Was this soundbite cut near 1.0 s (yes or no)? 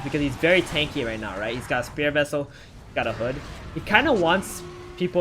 no